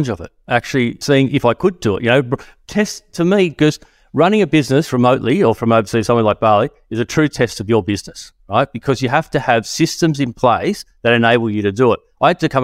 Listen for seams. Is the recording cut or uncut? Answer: cut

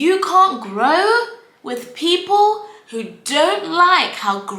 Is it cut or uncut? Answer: uncut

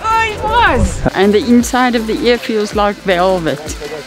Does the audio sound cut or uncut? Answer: cut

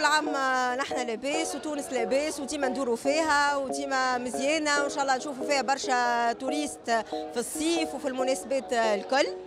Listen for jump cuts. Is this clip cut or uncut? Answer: uncut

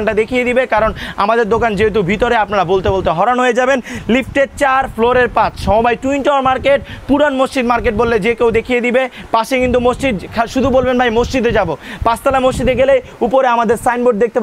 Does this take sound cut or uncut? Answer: uncut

